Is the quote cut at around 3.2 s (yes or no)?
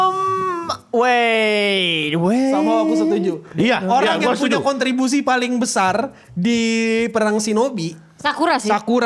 no